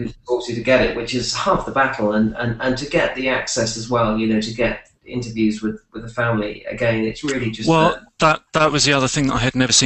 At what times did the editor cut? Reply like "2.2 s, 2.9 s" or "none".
3.8 s